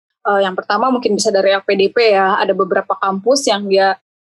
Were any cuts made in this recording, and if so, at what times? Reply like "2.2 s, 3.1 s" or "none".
none